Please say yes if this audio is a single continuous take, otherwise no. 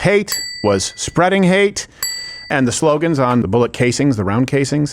no